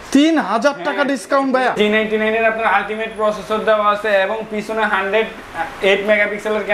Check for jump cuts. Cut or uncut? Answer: cut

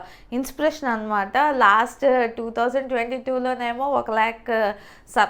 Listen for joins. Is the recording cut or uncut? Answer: uncut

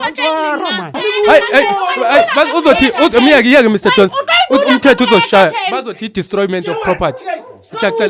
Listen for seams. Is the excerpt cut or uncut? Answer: cut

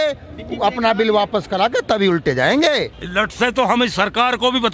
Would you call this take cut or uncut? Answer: cut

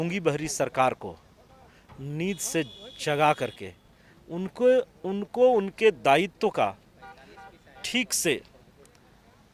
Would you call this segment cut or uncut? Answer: uncut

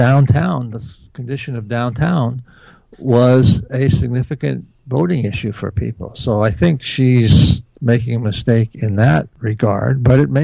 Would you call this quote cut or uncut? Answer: uncut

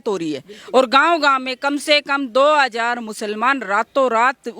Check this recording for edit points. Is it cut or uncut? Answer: uncut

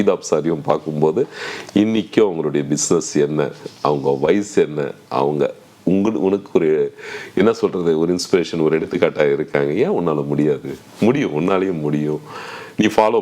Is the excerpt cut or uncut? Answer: uncut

